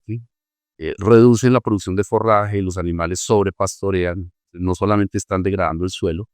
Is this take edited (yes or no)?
no